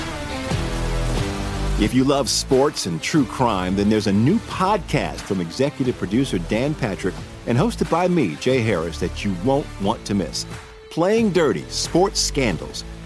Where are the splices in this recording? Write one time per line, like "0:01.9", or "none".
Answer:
none